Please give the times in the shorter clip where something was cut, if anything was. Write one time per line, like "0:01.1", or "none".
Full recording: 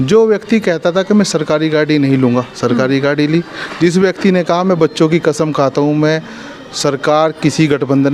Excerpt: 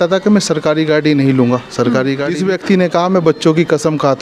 0:02.3